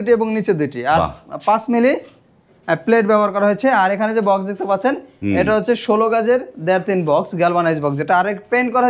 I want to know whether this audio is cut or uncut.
uncut